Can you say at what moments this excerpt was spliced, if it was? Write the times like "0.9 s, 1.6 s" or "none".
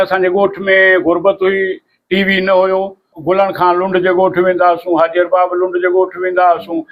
3.1 s